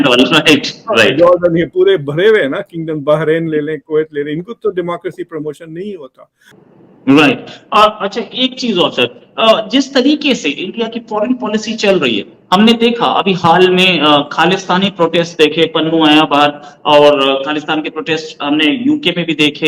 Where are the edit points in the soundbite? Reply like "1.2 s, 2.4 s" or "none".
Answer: 6.5 s